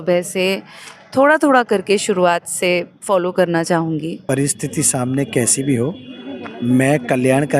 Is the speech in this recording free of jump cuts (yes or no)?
no